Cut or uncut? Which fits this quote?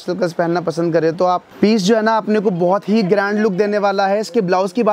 cut